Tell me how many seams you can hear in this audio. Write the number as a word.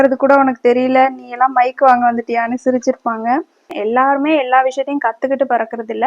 one